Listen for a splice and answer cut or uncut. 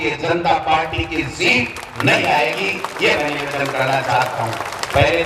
uncut